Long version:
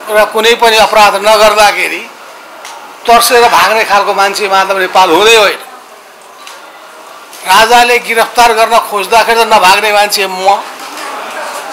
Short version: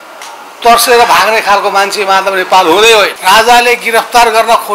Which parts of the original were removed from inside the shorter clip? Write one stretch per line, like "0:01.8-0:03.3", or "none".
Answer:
0:05.6-0:07.4